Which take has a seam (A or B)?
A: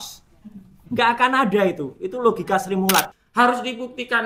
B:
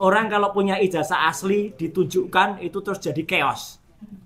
A